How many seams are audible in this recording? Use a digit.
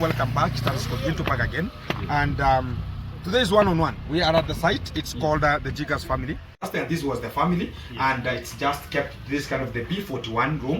1